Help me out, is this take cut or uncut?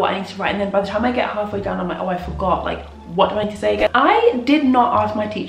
cut